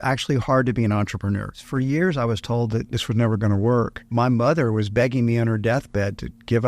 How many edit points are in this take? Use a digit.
3